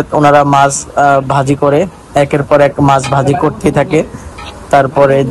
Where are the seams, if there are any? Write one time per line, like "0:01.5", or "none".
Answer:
none